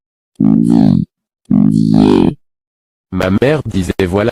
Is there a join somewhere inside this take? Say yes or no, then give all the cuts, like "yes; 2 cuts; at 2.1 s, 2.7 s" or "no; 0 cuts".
no; 0 cuts